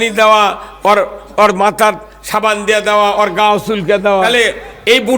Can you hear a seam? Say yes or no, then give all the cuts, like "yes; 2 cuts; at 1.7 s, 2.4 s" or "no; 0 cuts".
yes; 1 cut; at 4.3 s